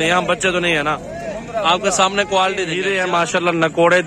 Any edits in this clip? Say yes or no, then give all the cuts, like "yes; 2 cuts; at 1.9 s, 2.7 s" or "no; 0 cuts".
yes; 1 cut; at 2.8 s